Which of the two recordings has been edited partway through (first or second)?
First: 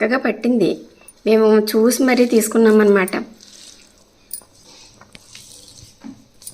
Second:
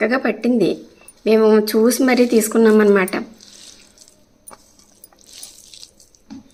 first